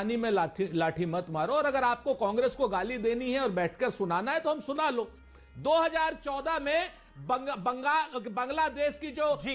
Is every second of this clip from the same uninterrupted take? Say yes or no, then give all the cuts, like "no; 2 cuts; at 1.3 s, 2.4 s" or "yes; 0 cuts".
no; 1 cut; at 5.2 s